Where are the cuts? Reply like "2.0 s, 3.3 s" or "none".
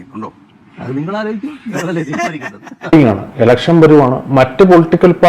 2.9 s